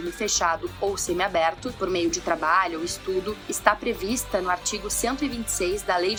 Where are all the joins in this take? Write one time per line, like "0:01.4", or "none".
none

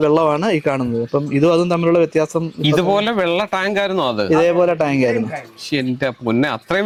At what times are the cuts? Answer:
none

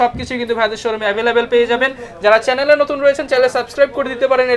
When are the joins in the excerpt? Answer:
none

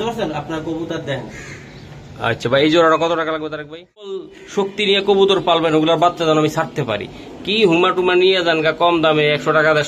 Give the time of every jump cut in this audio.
0:04.4

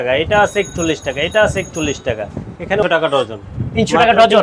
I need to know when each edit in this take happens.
0:02.8

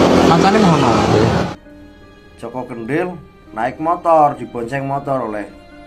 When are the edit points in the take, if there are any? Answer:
0:01.5

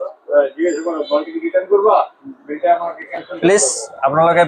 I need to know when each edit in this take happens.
none

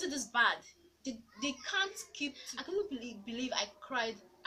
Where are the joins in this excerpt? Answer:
0:02.4

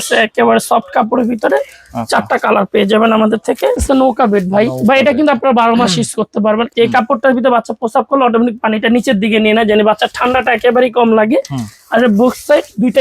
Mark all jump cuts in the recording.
0:03.8
0:06.7

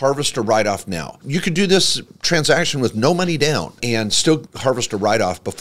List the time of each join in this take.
0:01.2
0:04.5

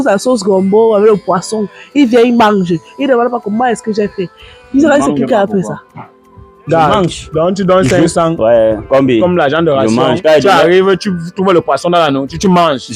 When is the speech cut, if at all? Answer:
none

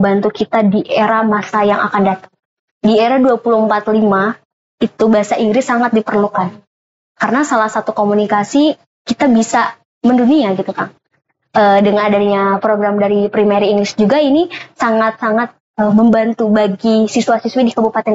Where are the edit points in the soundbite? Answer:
none

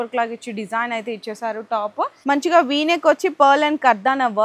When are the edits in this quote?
0:02.2

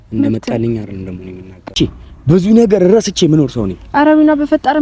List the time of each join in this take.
0:01.7

